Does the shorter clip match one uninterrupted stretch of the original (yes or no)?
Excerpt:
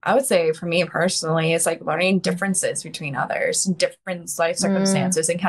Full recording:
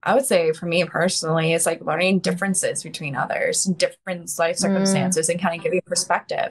yes